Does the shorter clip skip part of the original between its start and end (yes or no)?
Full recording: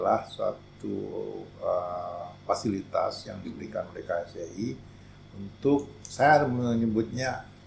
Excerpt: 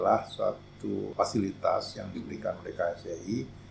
yes